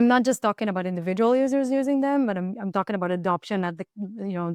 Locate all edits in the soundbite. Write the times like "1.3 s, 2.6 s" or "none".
none